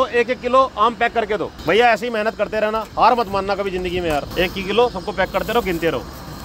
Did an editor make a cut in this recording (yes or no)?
yes